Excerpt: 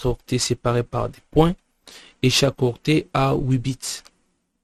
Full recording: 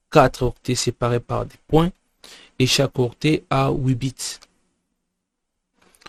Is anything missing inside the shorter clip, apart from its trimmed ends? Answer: no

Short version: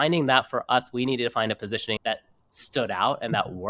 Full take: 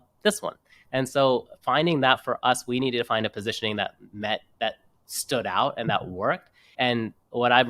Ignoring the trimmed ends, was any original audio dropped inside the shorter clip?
yes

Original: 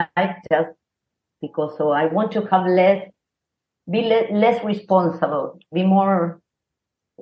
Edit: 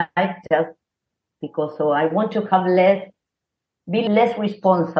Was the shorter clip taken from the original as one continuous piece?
no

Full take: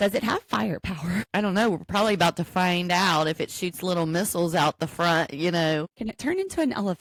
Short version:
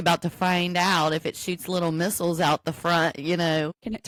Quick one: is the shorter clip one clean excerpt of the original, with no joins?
yes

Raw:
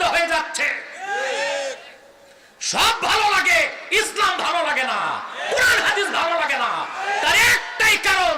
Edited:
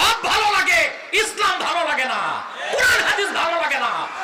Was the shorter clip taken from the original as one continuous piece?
yes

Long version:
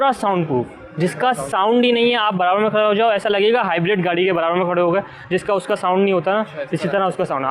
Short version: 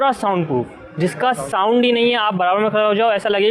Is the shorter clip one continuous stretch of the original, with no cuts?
yes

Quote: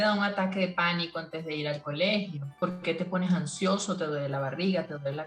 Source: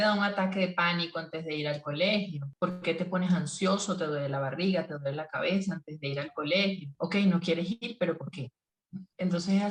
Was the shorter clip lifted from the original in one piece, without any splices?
yes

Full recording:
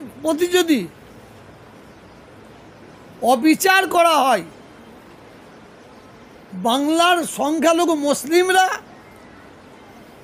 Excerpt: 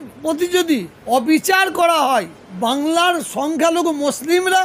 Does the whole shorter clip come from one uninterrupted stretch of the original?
no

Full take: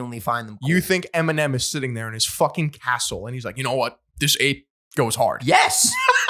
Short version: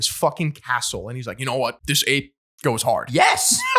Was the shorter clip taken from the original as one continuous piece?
no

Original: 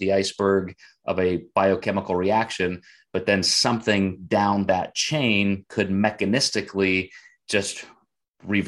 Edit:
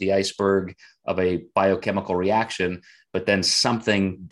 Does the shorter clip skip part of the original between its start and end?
no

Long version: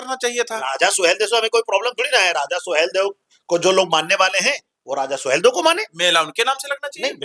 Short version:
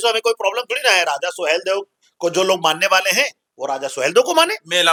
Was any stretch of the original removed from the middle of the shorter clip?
no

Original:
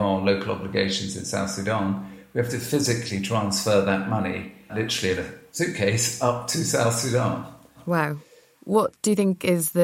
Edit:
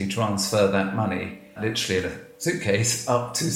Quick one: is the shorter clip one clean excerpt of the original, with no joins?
yes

